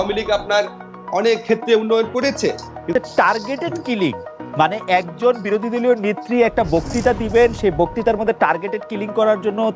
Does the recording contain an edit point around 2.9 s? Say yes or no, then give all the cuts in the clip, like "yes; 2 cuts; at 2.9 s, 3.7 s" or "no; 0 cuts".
yes; 1 cut; at 2.9 s